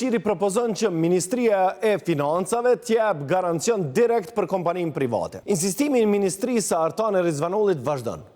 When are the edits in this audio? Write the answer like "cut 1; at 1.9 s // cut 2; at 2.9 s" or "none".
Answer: cut 1; at 5.4 s